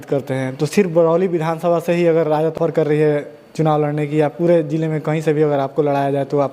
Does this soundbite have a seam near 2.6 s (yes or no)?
yes